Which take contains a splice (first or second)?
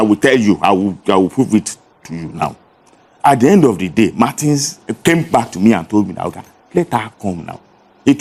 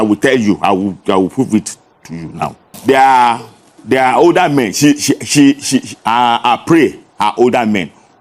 second